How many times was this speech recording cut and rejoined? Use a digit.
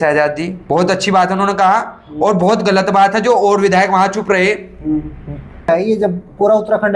1